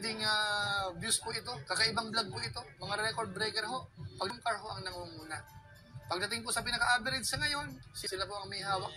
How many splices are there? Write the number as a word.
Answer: two